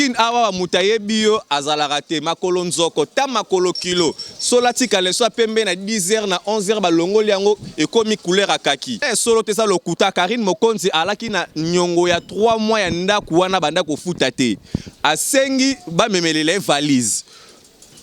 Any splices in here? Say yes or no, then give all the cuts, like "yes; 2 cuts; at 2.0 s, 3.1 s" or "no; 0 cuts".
yes; 1 cut; at 9.1 s